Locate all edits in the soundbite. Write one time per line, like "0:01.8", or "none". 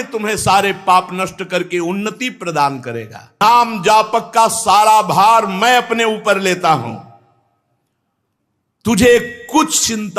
0:03.4